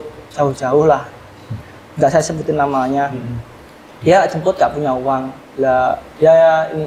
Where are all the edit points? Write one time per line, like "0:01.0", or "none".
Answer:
none